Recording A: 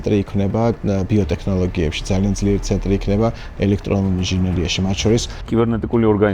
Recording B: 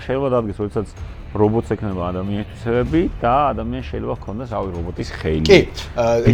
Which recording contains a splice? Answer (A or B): A